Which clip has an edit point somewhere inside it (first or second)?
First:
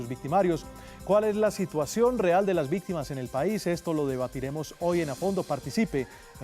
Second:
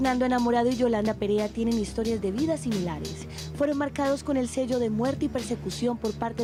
first